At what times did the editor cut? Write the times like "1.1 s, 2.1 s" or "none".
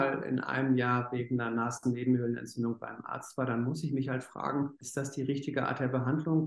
4.8 s